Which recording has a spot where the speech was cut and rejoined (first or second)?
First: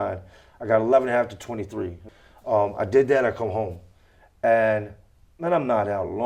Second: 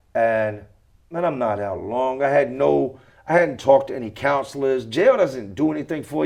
first